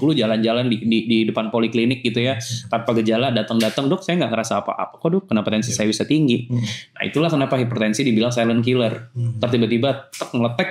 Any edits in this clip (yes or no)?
no